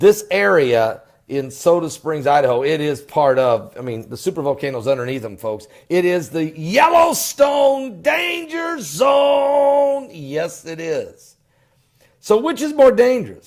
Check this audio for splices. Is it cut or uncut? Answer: uncut